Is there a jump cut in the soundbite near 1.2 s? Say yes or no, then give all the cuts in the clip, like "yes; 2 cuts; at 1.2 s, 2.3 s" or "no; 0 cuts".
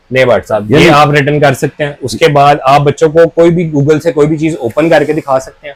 no; 0 cuts